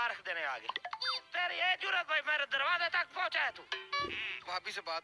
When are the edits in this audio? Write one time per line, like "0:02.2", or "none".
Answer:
0:01.1
0:04.3